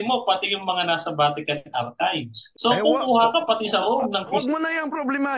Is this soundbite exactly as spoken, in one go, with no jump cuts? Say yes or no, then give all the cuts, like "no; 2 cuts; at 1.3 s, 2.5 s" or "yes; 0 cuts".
no; 2 cuts; at 2.4 s, 4.3 s